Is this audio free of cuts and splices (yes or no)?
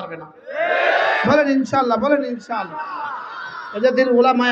yes